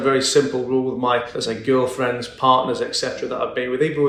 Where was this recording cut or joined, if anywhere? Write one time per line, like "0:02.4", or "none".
none